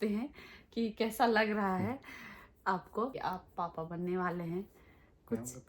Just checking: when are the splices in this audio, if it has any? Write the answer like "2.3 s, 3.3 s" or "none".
3.2 s